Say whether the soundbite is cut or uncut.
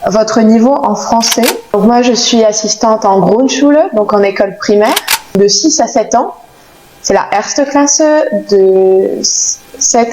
cut